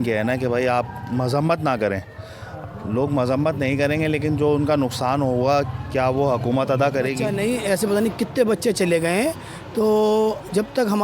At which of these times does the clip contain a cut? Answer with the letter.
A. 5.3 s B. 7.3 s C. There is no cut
B